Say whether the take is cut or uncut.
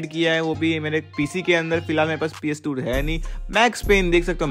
uncut